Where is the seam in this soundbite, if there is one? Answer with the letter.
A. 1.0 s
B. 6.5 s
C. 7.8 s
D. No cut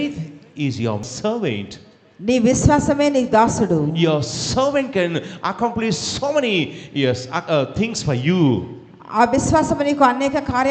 A